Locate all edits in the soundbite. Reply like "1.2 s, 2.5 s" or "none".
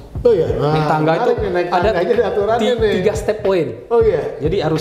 none